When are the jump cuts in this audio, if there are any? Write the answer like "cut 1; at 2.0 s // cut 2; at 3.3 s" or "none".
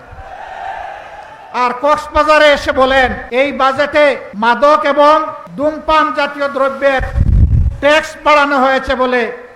cut 1; at 3.2 s // cut 2; at 4.3 s // cut 3; at 5.4 s